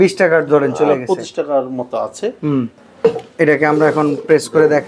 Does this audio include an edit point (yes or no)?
yes